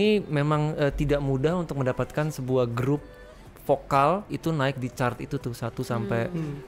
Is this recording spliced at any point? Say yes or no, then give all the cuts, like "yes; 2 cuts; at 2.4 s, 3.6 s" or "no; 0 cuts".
yes; 1 cut; at 4.3 s